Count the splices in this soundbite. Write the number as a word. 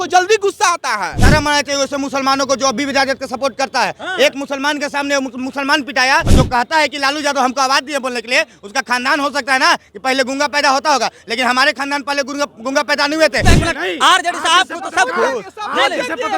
three